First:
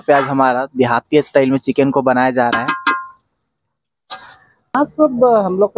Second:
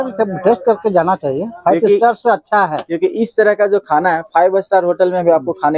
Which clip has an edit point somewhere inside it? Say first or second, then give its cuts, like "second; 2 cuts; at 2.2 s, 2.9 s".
first; 1 cut; at 4.5 s